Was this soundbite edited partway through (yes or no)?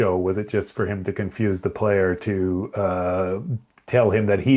no